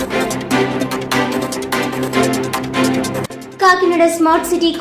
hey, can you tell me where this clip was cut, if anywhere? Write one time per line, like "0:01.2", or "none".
0:03.2